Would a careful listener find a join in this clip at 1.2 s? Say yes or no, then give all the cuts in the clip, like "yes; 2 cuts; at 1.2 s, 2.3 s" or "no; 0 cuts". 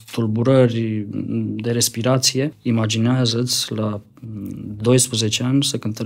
no; 1 cut; at 2.6 s